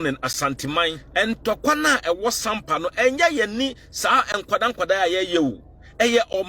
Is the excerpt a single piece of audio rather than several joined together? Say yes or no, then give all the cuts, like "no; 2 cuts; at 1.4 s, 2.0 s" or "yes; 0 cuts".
no; 1 cut; at 1.0 s